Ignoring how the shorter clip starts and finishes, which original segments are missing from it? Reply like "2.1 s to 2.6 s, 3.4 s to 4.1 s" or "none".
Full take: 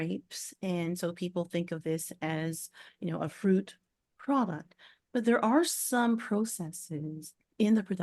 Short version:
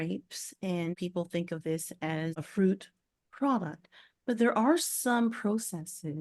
1.0 s to 1.2 s, 2.6 s to 3.3 s